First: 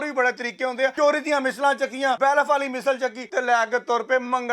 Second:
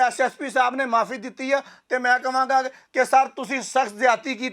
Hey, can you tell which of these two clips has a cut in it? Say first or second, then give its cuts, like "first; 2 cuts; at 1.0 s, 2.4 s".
first; 3 cuts; at 0.9 s, 2.2 s, 3.2 s